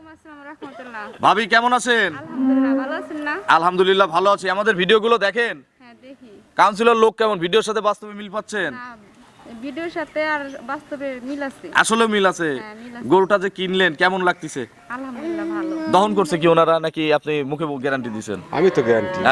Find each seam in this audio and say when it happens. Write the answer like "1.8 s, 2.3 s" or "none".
none